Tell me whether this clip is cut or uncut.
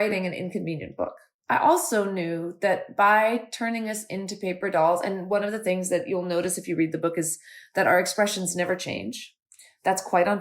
cut